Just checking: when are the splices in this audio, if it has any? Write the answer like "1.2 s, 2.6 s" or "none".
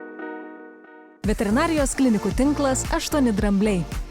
1.0 s